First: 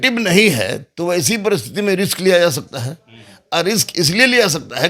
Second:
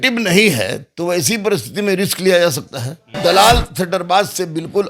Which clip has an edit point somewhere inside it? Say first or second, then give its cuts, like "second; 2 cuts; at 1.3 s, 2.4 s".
second; 1 cut; at 3.2 s